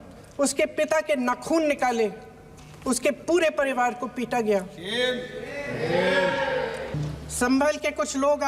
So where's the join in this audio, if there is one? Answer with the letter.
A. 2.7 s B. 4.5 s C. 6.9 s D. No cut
C